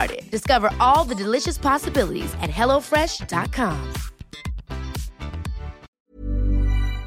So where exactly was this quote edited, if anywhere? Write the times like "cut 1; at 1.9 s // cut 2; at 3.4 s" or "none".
cut 1; at 5.9 s